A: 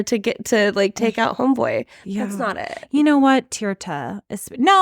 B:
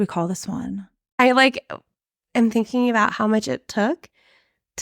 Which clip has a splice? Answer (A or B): B